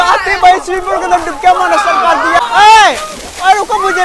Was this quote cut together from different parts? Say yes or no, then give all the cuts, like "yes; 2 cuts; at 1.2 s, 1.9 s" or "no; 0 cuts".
yes; 1 cut; at 2.4 s